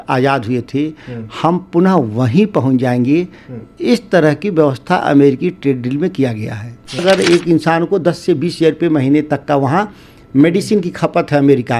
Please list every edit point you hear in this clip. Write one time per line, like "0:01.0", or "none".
0:07.0